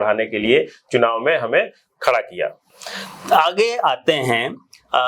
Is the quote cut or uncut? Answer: uncut